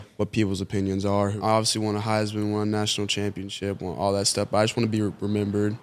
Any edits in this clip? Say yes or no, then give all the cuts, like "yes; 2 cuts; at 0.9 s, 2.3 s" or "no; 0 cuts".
yes; 1 cut; at 1.4 s